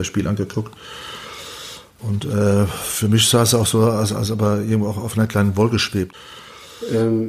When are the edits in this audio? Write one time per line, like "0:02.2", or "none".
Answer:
0:06.2

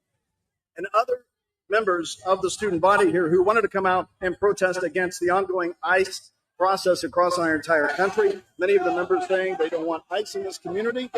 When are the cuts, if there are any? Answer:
0:10.0

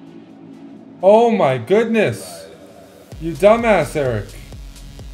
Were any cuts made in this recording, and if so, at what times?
0:01.0

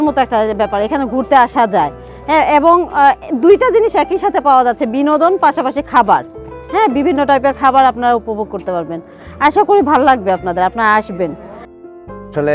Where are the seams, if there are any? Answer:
none

